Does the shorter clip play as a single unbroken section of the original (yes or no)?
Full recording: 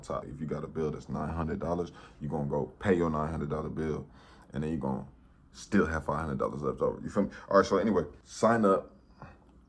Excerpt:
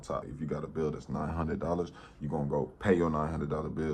yes